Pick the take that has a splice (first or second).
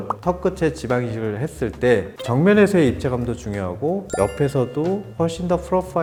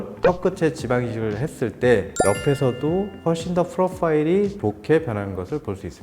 second